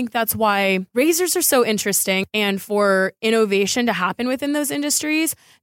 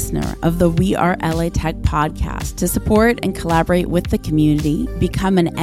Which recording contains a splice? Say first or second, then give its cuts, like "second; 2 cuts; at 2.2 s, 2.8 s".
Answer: first; 2 cuts; at 0.9 s, 2.2 s